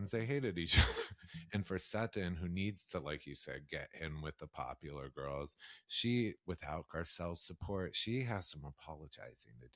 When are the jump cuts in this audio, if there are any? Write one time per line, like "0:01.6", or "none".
0:01.2